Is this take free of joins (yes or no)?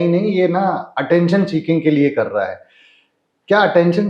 yes